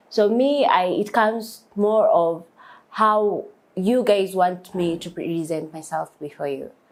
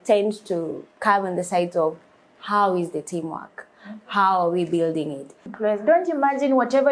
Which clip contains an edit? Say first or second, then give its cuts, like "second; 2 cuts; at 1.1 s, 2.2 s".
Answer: second; 1 cut; at 5.4 s